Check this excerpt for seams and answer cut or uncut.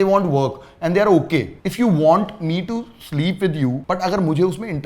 cut